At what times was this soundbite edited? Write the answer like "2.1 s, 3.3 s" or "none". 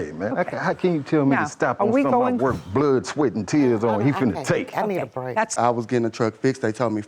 5.5 s